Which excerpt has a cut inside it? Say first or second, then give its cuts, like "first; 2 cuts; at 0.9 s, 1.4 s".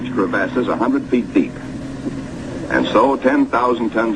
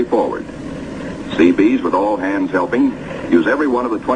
first; 1 cut; at 3.2 s